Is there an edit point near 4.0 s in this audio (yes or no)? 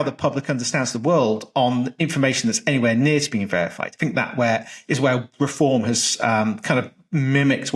yes